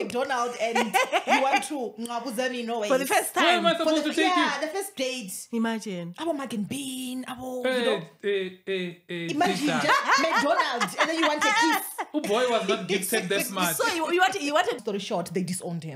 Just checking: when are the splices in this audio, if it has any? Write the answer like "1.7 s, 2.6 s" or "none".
14.8 s